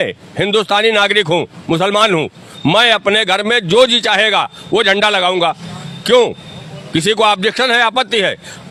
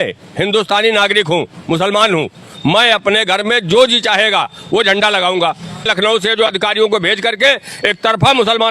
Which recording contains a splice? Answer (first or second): second